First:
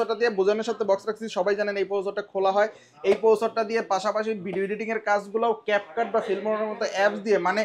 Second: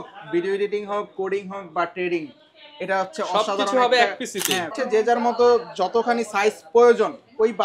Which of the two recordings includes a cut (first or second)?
second